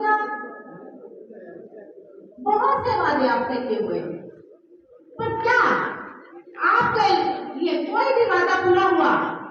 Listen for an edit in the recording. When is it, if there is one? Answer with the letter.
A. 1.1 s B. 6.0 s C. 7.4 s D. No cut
D